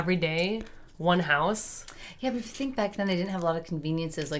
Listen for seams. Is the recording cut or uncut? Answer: uncut